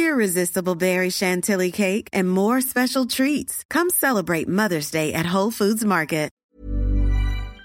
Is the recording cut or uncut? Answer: cut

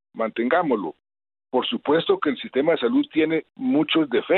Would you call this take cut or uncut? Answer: uncut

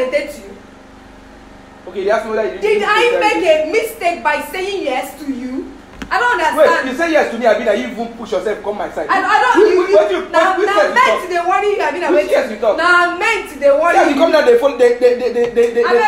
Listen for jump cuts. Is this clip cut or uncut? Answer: uncut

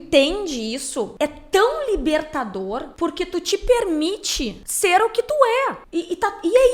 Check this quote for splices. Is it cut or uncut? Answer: cut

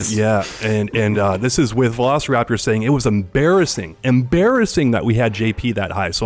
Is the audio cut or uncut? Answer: uncut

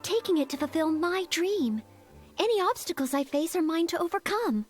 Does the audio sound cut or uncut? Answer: uncut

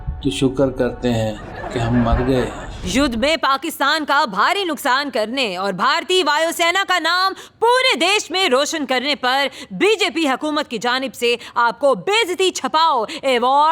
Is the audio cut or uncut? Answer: cut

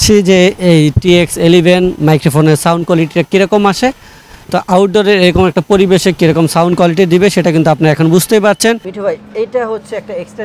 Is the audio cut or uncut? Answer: cut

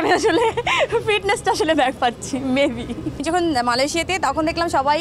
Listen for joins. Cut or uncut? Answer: cut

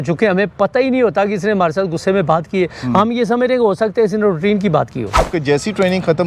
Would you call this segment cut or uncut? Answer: cut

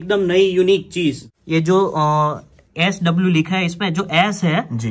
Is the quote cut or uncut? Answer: cut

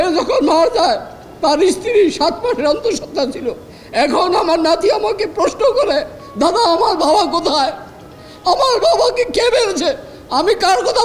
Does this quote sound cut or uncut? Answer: uncut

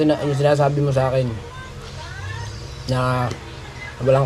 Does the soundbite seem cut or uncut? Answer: uncut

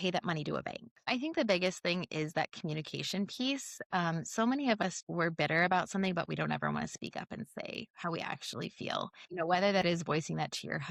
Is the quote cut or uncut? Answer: cut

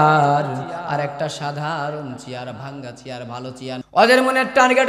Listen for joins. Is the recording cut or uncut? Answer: cut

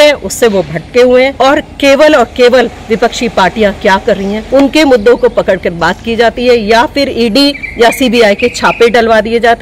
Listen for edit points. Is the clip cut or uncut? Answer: cut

